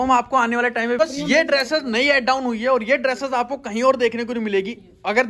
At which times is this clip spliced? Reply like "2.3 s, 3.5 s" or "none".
1.0 s